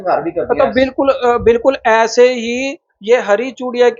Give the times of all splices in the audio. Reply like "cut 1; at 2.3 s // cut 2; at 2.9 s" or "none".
none

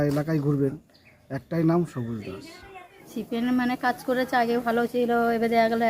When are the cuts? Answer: cut 1; at 3.2 s

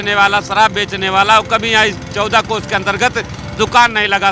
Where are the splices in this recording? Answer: none

